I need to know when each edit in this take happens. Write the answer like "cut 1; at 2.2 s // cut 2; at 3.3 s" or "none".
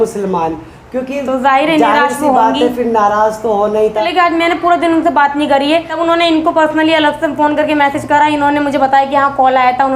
cut 1; at 4.1 s // cut 2; at 5.9 s